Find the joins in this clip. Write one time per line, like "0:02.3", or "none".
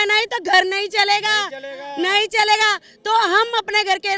none